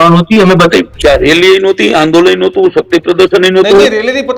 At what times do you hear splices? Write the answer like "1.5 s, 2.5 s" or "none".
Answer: 0.9 s